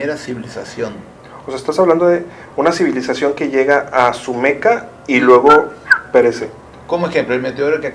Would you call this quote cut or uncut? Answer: uncut